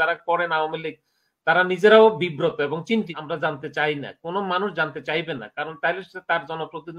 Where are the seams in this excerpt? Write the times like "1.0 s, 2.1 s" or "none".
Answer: 3.2 s